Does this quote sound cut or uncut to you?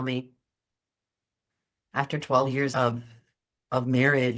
cut